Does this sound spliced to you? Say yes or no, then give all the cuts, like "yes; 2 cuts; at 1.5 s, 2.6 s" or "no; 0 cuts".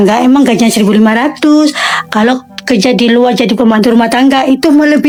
no; 0 cuts